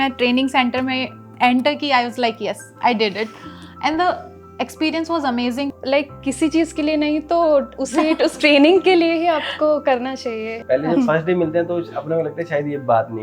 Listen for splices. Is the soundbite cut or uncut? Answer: cut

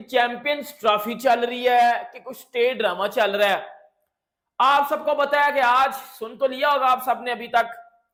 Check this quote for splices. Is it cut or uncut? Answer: uncut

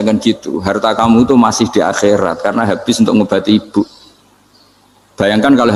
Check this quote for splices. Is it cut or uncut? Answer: uncut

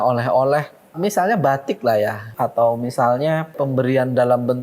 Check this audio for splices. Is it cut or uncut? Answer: cut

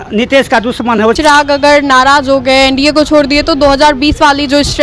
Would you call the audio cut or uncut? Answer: cut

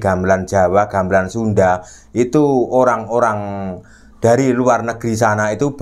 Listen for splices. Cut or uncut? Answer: uncut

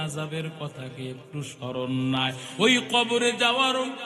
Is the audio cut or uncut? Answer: cut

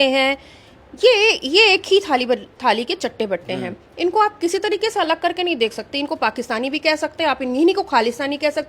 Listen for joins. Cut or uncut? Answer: uncut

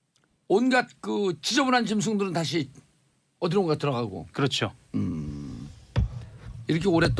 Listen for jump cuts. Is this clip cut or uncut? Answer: uncut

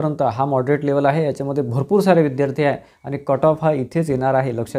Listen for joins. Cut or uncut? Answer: uncut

